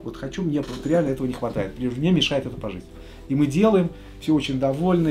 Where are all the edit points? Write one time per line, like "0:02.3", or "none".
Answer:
none